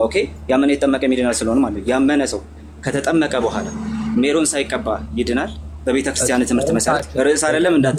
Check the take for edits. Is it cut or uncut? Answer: uncut